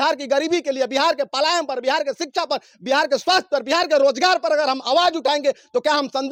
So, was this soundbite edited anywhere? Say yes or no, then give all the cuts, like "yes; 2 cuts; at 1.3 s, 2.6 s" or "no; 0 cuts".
no; 0 cuts